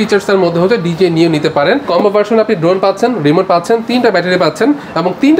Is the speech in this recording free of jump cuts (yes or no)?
no